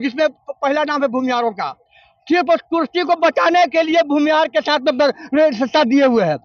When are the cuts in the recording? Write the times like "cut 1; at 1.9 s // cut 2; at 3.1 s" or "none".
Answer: none